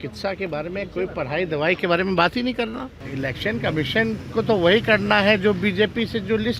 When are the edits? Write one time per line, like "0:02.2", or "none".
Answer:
0:03.0

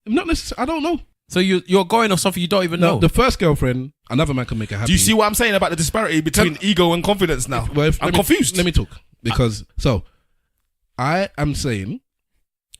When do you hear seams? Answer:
0:01.2
0:09.6

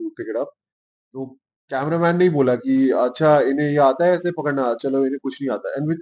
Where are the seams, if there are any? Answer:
none

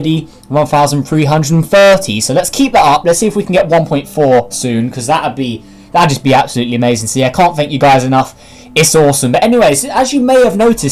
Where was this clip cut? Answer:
none

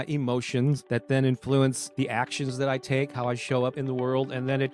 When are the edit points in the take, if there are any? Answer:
0:00.8
0:01.8
0:03.7

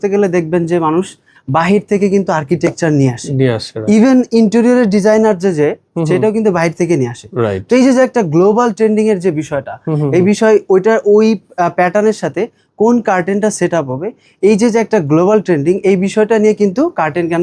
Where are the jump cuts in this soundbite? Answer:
none

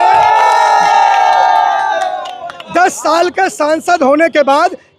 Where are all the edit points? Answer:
0:02.5

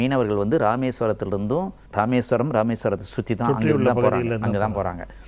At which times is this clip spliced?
0:01.8

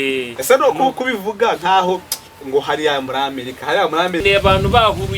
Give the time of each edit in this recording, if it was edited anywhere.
0:04.2

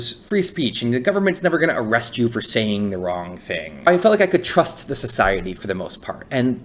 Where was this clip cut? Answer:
0:03.9
0:05.6

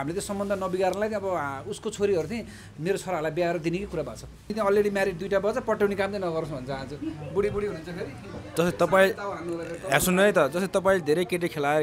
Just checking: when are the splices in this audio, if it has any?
0:04.5

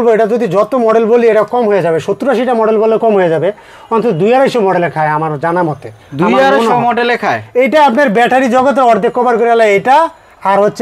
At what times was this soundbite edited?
none

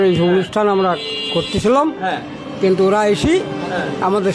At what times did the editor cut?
none

